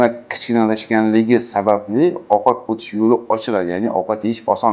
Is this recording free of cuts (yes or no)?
yes